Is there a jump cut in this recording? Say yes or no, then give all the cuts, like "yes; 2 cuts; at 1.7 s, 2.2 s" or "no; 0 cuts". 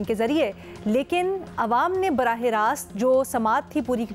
no; 0 cuts